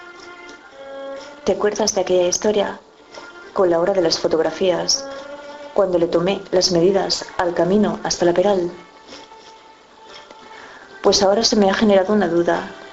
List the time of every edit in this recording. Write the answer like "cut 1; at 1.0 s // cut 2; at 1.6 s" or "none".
cut 1; at 2.3 s